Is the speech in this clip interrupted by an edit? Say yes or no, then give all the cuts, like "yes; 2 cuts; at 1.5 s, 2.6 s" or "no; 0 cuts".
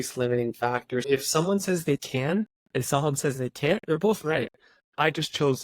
yes; 1 cut; at 1.1 s